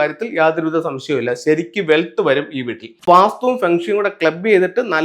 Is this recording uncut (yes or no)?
no